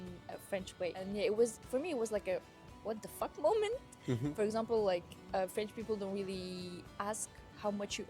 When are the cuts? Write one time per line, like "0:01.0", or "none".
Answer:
0:01.0
0:04.3